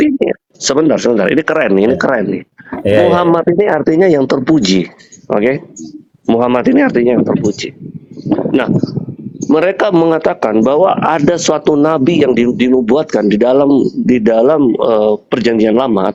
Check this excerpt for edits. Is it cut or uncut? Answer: uncut